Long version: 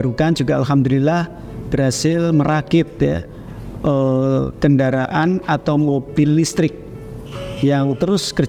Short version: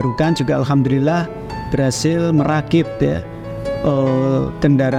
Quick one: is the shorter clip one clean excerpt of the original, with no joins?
yes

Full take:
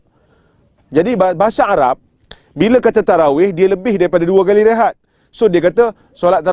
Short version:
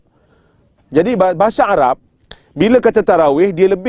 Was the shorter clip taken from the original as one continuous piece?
yes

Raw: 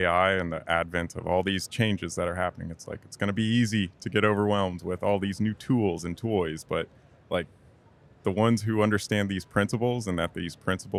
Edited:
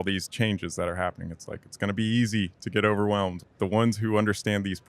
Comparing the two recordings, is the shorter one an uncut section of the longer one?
no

